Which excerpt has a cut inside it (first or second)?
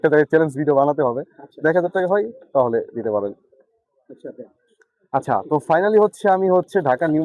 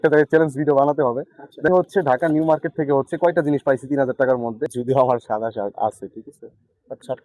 second